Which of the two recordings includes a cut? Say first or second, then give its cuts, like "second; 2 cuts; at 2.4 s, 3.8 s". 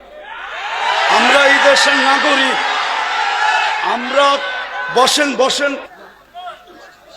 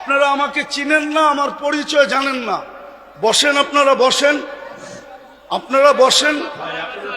first; 1 cut; at 5.9 s